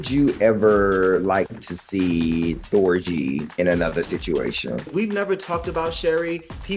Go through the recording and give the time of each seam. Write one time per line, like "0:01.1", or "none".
0:03.5
0:04.9